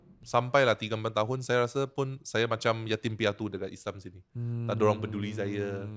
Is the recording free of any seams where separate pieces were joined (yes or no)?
yes